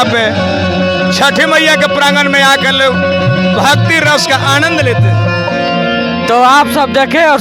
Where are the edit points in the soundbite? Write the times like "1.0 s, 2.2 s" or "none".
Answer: none